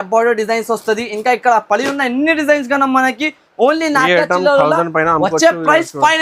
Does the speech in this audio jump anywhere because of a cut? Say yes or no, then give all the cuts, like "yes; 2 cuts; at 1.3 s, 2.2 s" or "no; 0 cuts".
no; 0 cuts